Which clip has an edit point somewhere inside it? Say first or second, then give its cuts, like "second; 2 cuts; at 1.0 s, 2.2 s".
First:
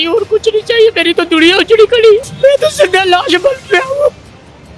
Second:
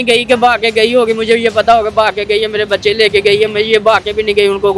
first; 1 cut; at 2.3 s